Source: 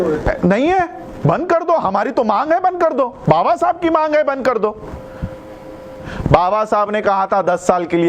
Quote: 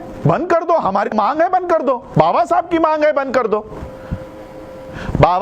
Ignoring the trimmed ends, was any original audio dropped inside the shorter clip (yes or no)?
yes